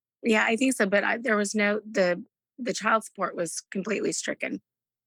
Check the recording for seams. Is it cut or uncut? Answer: uncut